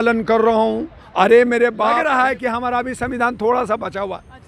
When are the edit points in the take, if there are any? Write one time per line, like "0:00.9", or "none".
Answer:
0:02.0